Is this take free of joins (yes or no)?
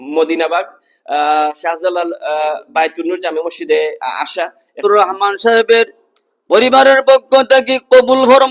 no